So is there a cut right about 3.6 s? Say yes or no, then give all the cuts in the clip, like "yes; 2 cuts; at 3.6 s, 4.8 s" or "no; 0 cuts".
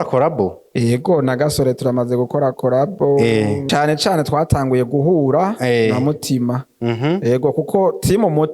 yes; 1 cut; at 3.6 s